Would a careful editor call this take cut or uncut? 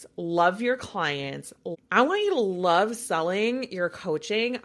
cut